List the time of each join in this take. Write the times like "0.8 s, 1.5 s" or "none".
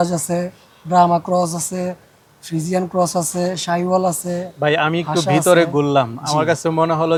none